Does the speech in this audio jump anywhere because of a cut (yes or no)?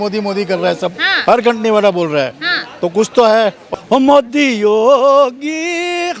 yes